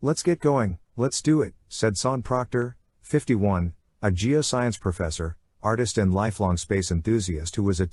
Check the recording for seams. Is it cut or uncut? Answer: uncut